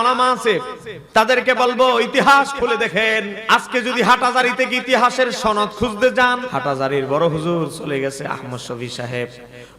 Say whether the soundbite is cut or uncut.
cut